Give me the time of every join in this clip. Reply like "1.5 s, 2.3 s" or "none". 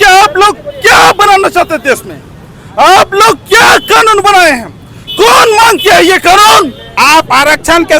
6.8 s